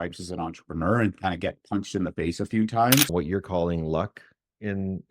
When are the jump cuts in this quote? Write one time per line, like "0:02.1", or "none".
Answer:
0:03.1